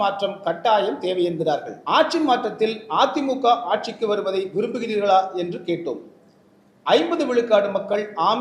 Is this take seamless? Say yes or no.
no